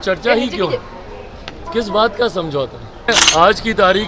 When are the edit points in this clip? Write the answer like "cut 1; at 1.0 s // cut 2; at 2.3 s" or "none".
cut 1; at 3.1 s